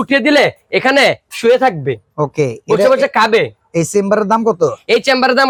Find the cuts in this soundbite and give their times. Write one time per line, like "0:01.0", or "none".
none